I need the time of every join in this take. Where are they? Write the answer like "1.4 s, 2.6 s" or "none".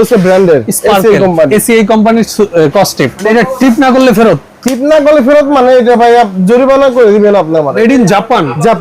3.2 s, 7.7 s